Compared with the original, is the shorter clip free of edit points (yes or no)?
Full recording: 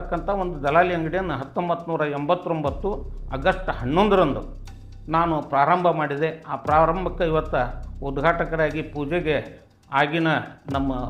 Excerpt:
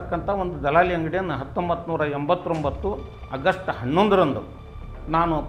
yes